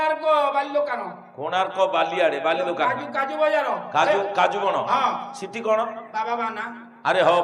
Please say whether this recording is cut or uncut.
uncut